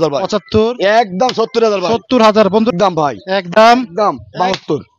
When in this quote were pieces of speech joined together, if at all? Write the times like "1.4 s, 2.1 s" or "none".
2.7 s